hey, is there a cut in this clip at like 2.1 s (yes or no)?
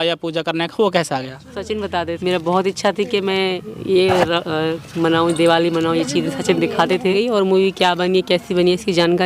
yes